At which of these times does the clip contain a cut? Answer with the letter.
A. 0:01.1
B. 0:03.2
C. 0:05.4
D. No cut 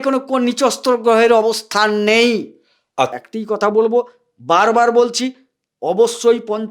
B